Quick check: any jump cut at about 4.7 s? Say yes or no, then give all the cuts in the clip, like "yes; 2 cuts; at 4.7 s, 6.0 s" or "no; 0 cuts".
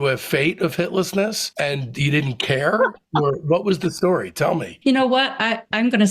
yes; 2 cuts; at 1.4 s, 4.7 s